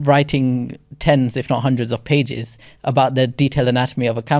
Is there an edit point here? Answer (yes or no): no